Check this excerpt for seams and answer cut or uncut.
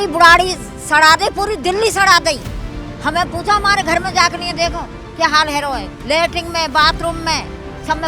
uncut